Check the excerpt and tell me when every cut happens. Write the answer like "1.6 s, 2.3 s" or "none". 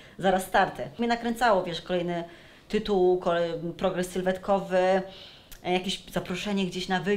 0.9 s